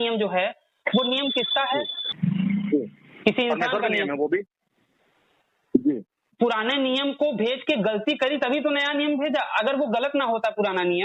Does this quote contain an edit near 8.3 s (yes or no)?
no